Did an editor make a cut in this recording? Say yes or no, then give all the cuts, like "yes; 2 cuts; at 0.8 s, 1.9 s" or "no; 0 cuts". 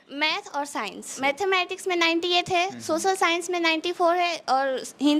yes; 1 cut; at 1.1 s